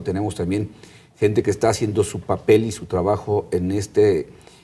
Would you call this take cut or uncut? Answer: cut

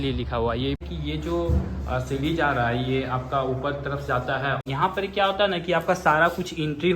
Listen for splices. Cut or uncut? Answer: cut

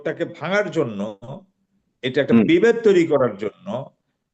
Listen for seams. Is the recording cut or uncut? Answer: uncut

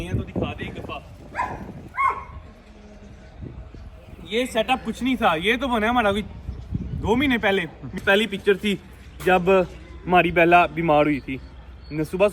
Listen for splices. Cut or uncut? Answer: cut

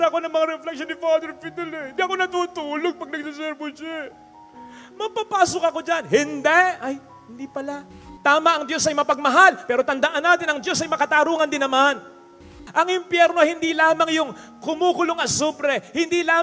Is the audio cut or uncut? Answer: cut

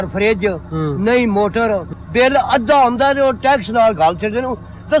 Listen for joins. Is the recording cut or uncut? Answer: cut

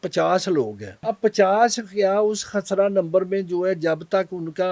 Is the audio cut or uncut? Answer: cut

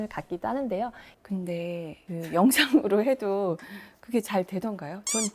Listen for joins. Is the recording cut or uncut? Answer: cut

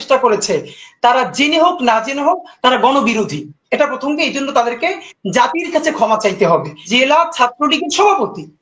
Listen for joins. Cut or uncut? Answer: cut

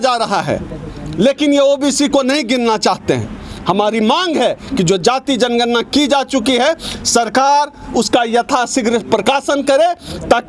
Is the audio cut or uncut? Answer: uncut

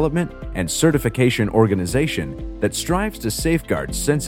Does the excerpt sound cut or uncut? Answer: uncut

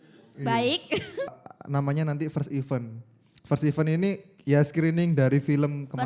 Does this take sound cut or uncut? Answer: cut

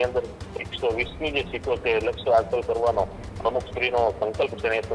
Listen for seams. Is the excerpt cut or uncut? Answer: uncut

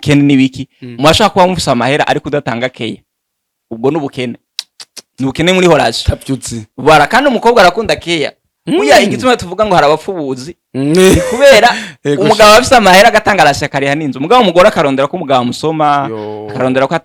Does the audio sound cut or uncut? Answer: uncut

